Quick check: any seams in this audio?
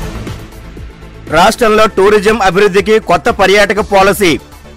yes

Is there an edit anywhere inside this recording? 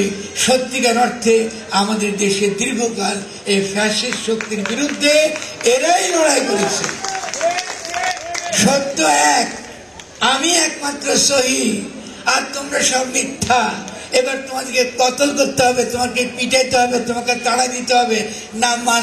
no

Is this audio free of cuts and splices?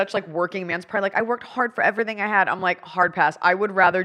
yes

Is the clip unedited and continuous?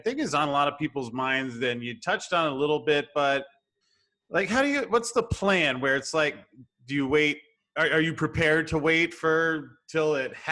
yes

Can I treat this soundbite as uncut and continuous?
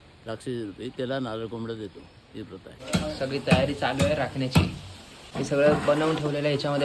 no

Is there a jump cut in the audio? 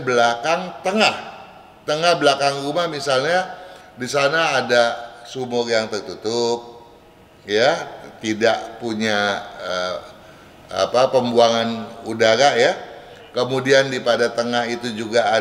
no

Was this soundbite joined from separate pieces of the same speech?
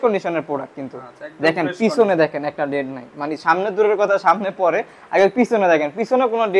no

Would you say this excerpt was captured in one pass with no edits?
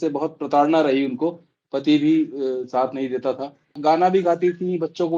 no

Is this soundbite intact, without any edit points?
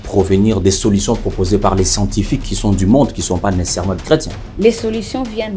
no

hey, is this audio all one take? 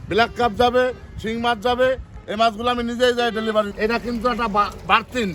no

